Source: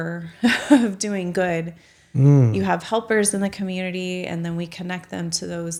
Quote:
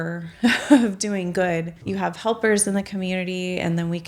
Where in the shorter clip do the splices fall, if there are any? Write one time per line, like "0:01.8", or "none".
0:01.9